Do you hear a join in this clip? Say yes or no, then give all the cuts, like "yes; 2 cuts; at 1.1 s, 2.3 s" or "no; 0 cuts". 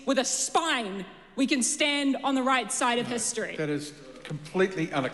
yes; 1 cut; at 3.9 s